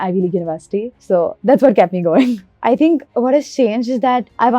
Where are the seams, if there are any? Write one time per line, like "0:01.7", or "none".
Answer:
0:02.5